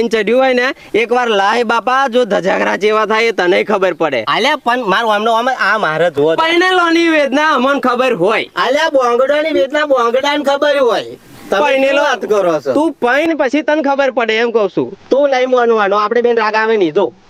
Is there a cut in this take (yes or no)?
no